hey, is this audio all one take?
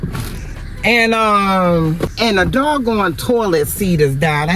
no; 1 cut; at 2.1 s

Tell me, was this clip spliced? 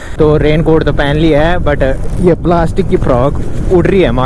no; 0 cuts

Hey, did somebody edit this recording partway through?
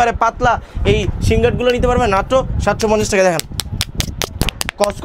no; 0 cuts

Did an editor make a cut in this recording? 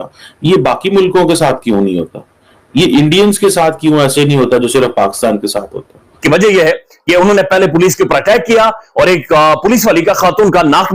yes; 1 cut; at 6.2 s

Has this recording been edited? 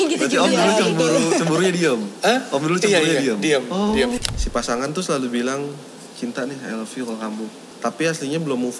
yes; 2 cuts; at 4.2 s, 7.6 s

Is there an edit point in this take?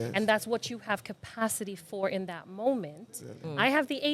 no; 0 cuts

